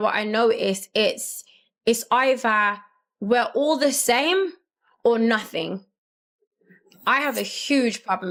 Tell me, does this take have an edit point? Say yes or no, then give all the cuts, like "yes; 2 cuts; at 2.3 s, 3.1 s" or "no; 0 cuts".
no; 0 cuts